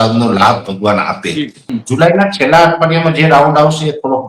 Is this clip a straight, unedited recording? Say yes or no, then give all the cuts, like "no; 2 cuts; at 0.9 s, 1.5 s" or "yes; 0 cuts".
no; 1 cut; at 1.7 s